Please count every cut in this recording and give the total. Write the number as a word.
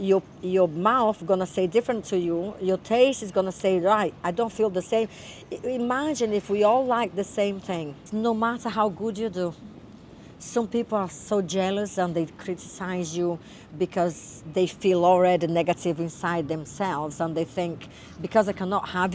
one